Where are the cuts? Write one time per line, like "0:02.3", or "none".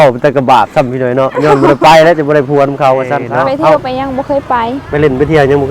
0:03.3